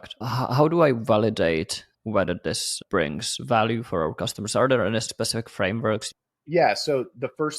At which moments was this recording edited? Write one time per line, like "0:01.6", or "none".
0:01.9
0:02.8
0:05.1
0:06.1